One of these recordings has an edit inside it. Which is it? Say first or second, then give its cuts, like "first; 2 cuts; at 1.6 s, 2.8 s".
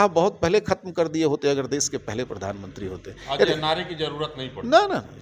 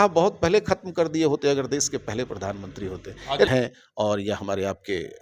second; 1 cut; at 3.5 s